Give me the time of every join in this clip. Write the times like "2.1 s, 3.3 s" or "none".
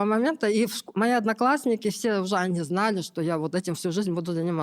none